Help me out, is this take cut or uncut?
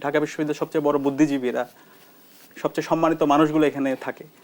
uncut